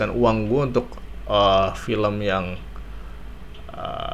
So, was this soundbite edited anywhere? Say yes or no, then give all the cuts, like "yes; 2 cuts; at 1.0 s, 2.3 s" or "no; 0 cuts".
no; 0 cuts